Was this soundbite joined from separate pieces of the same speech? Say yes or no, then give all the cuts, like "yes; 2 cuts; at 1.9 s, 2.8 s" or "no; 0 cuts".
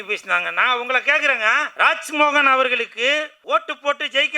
yes; 2 cuts; at 1.7 s, 3.3 s